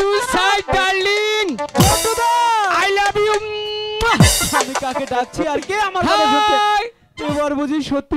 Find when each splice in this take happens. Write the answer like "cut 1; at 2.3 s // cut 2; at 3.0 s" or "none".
cut 1; at 7.0 s